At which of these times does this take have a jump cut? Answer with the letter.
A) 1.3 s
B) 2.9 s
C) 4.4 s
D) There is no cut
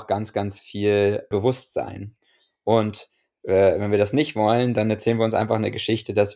A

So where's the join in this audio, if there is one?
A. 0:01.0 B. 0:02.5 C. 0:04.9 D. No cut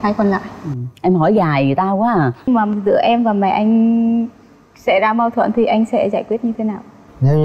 B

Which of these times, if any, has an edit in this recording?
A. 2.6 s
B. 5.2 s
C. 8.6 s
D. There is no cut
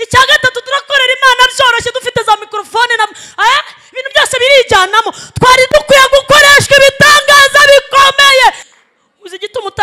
C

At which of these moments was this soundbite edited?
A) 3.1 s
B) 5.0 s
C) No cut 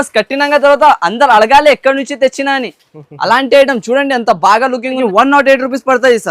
B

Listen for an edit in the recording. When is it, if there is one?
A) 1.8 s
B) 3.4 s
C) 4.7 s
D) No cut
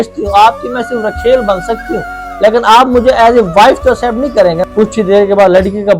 C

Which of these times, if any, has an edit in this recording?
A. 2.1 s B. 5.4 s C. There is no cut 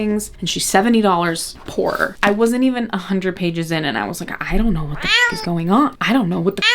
A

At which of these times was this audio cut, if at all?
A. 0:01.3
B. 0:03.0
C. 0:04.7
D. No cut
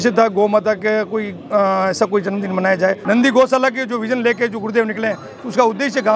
B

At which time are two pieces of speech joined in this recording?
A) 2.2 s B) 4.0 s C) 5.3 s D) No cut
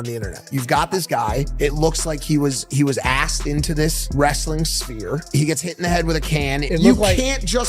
D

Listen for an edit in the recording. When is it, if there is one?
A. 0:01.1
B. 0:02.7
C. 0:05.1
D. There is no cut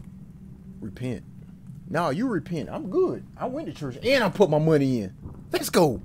D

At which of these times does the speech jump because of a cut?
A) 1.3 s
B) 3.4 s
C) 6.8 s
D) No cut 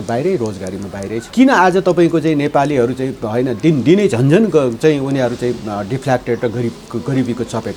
A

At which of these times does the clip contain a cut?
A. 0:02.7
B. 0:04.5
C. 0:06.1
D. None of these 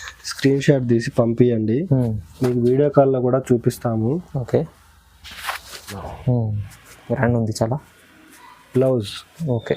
C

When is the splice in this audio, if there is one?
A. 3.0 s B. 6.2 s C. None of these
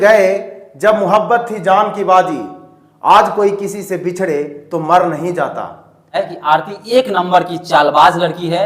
B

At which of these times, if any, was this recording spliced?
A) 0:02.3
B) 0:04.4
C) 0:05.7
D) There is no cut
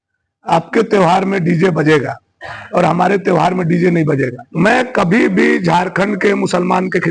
B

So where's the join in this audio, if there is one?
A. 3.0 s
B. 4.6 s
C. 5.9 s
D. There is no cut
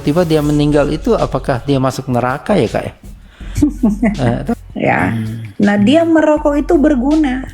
B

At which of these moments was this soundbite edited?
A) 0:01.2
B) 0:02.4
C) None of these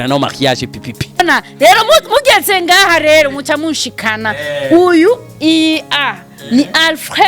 A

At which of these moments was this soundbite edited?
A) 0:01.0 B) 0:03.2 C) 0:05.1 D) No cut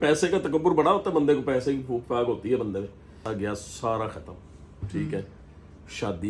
B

